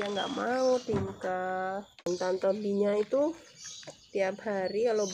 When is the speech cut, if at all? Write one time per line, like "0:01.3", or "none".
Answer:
0:02.1